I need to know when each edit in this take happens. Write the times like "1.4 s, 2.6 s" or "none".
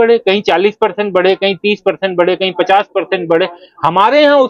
none